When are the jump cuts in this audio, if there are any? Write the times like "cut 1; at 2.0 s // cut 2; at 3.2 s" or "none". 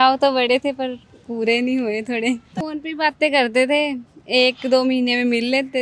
cut 1; at 2.5 s